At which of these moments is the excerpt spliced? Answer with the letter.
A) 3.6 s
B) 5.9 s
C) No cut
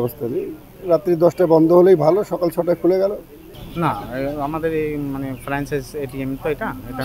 A